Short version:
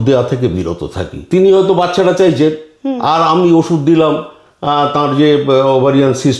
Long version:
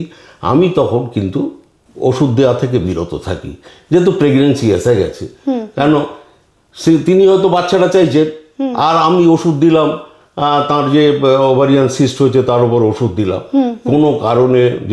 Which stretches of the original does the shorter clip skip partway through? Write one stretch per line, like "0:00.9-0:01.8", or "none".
0:03.6-0:07.0